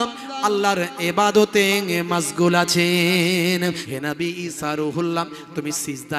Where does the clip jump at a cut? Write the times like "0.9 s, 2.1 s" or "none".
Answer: 3.8 s